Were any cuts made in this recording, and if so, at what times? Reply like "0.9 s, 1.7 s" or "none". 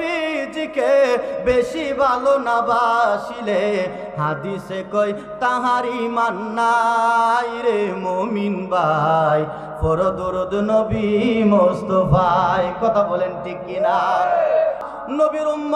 14.8 s